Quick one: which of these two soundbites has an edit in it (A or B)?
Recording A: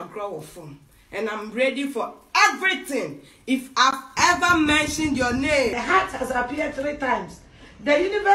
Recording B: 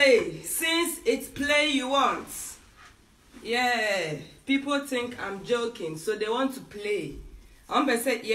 A